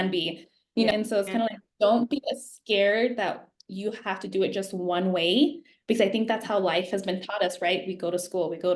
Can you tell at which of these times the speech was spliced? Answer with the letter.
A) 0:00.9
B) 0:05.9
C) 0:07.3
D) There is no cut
A